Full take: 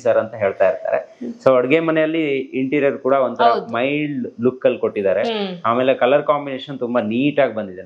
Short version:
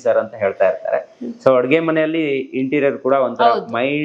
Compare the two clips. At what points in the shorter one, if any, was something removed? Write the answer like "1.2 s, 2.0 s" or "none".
none